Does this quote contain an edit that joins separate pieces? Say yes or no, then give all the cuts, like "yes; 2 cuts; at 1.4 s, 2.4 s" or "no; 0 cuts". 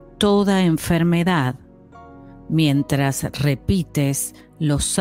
no; 0 cuts